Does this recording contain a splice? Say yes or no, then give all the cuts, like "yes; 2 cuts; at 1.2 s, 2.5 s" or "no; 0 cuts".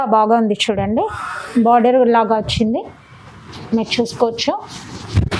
no; 0 cuts